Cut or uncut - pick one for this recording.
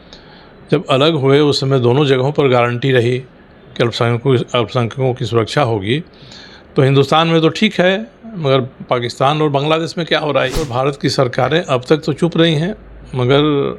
cut